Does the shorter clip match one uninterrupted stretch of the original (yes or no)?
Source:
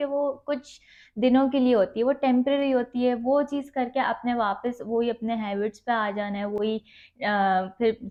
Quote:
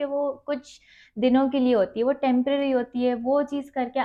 yes